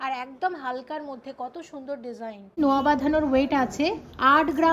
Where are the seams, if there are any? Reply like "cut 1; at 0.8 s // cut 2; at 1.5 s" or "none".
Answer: cut 1; at 2.6 s